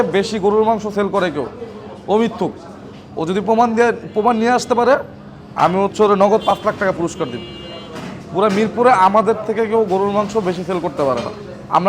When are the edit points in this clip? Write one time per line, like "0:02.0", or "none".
none